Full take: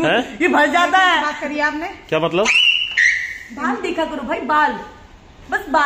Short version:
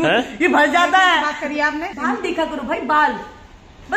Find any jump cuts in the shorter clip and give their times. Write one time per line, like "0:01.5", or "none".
0:01.9

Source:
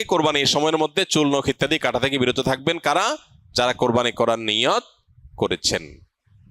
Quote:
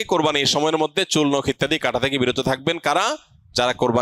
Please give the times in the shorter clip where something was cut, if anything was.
none

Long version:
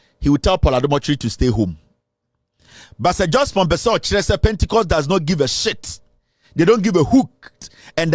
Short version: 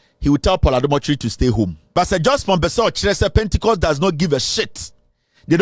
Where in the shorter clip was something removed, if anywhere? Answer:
0:01.8

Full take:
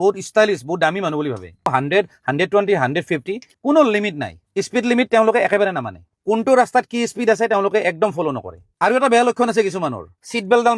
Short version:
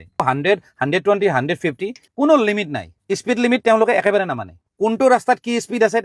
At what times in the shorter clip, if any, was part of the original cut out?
none

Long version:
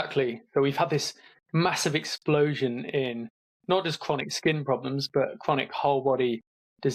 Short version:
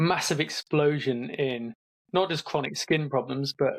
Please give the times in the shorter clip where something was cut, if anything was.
none

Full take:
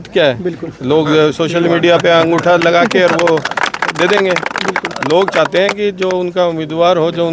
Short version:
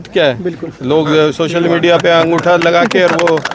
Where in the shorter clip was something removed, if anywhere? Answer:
none

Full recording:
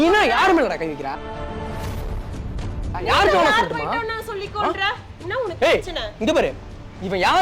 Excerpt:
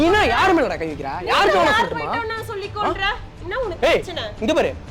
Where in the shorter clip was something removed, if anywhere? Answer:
0:01.1

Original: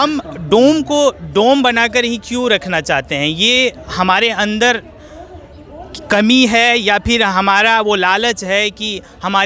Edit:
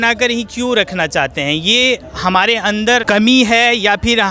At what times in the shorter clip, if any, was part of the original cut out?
0:03.0

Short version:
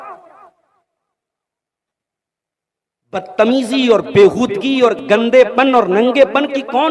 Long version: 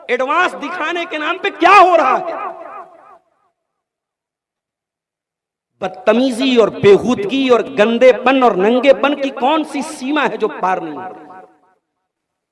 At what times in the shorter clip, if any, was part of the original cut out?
none

